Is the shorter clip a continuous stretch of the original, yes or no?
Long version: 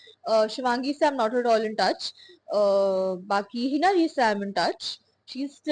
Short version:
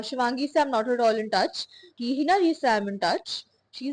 no